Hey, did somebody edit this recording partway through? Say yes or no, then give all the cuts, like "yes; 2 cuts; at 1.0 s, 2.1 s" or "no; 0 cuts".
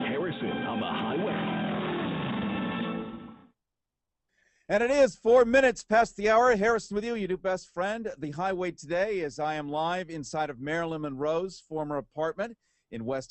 no; 0 cuts